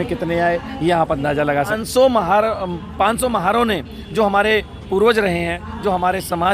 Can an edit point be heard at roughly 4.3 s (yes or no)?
no